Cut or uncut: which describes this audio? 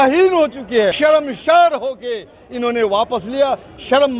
cut